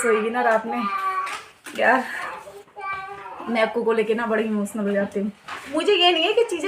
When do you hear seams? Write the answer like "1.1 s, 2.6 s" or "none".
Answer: 5.5 s

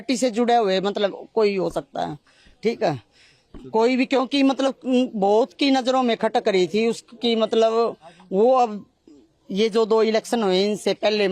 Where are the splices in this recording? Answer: none

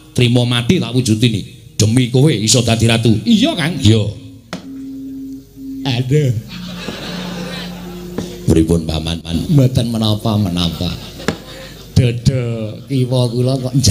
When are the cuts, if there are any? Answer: none

